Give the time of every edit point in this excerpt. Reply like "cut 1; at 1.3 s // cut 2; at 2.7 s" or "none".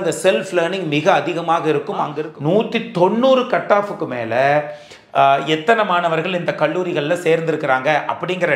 cut 1; at 2.1 s